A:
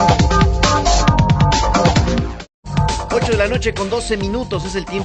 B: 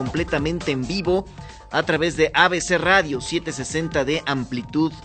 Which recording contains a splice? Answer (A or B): A